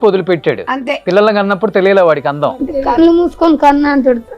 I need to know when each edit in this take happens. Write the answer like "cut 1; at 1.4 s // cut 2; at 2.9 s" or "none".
cut 1; at 0.9 s